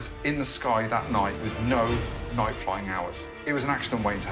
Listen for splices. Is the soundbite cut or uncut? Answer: cut